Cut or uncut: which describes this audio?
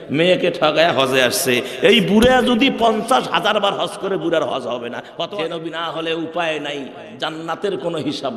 cut